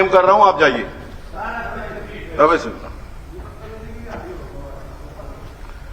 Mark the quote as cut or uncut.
uncut